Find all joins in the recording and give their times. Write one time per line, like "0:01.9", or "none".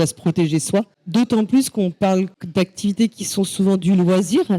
0:01.0
0:02.4